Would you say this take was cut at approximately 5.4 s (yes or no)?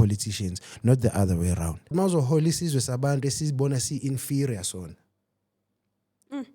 no